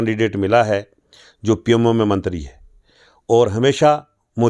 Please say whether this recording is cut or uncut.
uncut